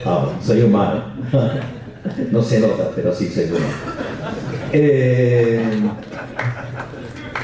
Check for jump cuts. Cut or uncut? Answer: uncut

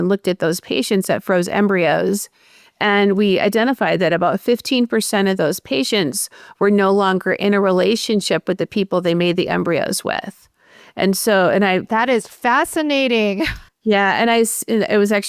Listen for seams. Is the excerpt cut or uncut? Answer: uncut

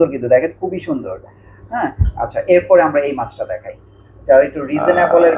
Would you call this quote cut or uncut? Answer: uncut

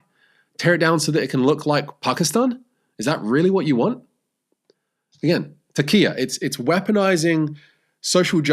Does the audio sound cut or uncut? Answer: uncut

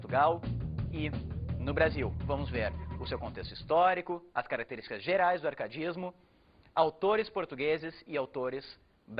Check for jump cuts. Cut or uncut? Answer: cut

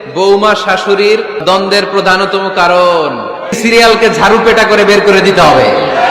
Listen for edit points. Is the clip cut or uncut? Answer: cut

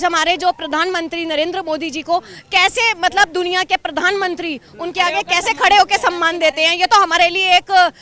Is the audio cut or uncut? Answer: uncut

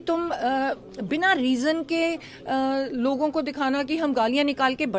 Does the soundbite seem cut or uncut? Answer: uncut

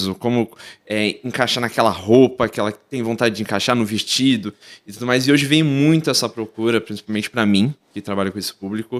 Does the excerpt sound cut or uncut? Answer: uncut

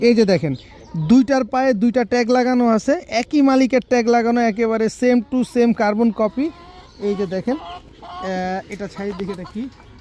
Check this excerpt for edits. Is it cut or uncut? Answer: uncut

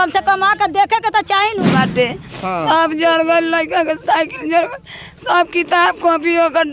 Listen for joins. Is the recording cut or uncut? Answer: cut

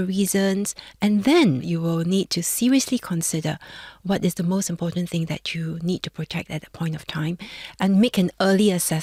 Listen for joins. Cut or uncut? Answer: uncut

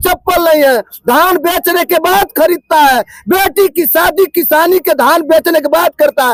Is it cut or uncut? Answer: uncut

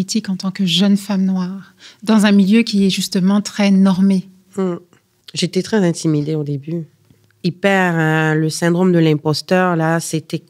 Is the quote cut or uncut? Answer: uncut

